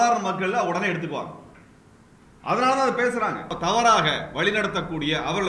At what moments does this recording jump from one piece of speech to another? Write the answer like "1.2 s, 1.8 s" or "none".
3.5 s